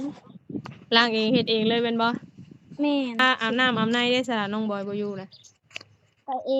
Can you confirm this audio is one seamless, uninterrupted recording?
no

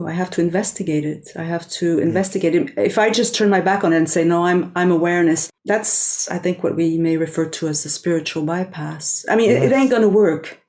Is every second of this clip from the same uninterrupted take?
no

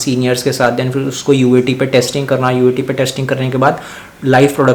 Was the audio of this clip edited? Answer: no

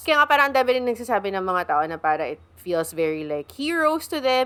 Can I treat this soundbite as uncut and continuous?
yes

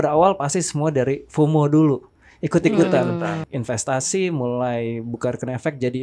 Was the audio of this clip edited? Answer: yes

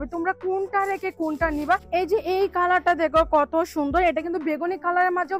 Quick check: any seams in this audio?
yes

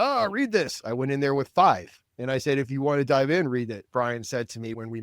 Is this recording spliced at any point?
yes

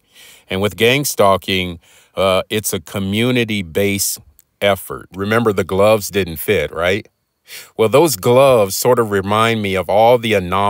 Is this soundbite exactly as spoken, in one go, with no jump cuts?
no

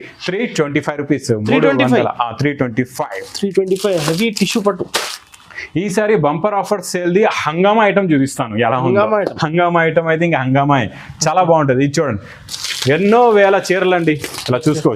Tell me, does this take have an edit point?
no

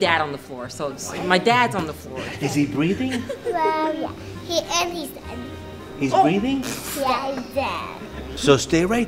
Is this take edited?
no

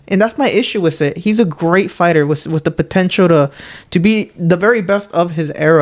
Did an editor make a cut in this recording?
no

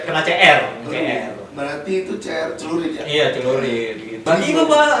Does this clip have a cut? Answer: yes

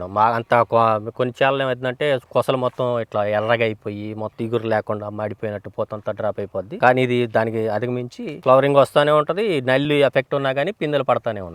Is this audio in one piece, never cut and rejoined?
yes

